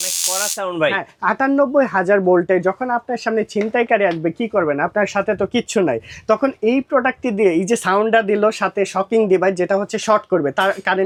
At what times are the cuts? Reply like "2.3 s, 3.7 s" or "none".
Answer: none